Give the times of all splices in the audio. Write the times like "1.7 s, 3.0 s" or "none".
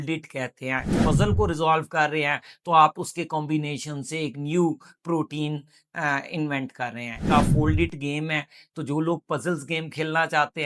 1.0 s, 7.2 s